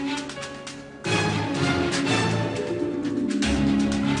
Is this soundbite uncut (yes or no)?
no